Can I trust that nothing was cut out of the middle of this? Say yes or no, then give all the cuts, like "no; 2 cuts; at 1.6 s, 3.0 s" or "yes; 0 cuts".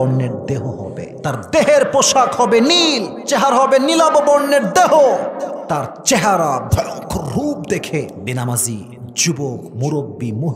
no; 4 cuts; at 1.1 s, 3.1 s, 5.6 s, 8.2 s